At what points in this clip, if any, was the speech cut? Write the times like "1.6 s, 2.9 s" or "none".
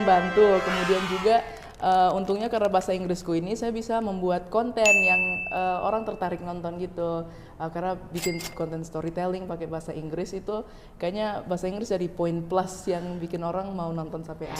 none